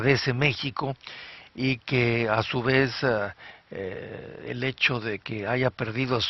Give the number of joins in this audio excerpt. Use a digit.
1